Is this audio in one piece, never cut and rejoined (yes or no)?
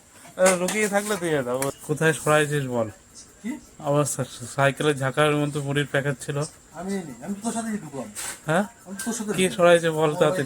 no